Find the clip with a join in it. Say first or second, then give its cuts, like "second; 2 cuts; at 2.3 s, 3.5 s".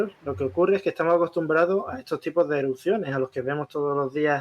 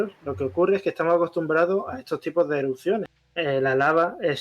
second; 1 cut; at 3.1 s